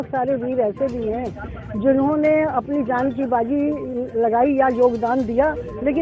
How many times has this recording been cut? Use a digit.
0